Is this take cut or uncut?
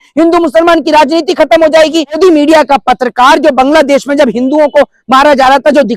cut